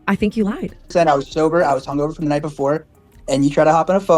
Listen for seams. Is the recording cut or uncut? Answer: cut